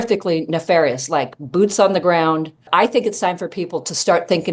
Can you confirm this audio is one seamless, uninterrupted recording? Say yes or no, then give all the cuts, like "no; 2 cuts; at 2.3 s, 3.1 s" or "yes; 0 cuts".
no; 1 cut; at 2.7 s